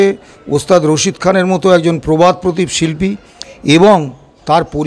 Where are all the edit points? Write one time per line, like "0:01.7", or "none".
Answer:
none